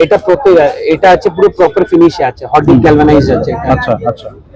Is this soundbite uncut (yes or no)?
yes